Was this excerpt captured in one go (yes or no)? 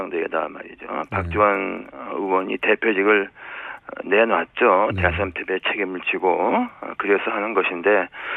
yes